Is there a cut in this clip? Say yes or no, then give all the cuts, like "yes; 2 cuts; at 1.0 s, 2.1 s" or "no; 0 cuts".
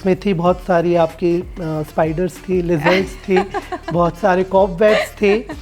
no; 0 cuts